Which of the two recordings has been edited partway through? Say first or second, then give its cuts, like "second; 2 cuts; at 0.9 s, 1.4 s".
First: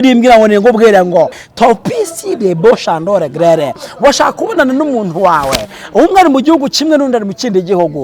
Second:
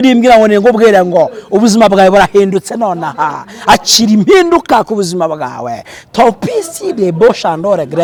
first; 1 cut; at 1.4 s